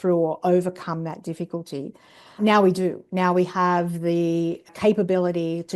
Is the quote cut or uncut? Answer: cut